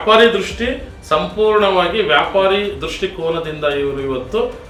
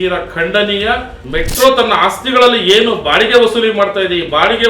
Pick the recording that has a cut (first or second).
second